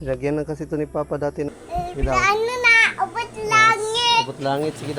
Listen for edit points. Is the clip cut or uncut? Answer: cut